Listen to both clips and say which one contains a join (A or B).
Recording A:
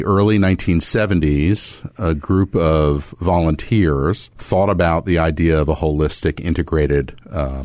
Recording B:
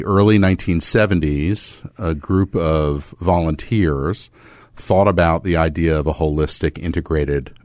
A